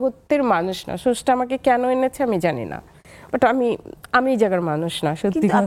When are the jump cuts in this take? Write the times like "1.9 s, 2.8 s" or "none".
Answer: none